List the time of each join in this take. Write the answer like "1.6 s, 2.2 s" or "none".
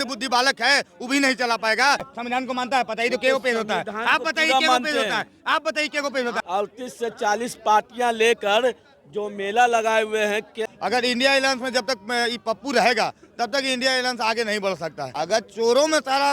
2.1 s, 6.4 s, 10.6 s, 15.0 s